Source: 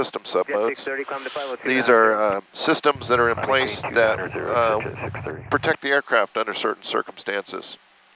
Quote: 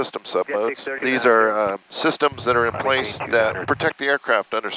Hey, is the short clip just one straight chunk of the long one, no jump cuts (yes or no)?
no